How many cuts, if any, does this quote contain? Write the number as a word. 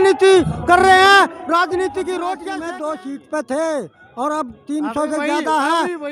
one